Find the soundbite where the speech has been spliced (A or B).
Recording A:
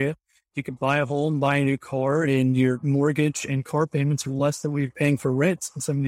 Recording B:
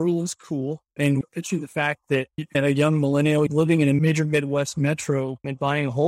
B